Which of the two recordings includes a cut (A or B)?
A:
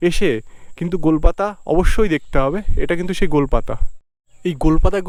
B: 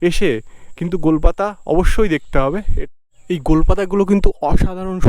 B